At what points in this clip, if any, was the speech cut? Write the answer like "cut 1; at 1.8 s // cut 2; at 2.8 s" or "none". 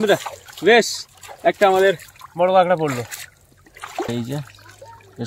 cut 1; at 4.1 s